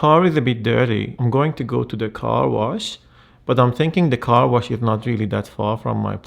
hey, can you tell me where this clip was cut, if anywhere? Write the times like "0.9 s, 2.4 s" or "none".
1.1 s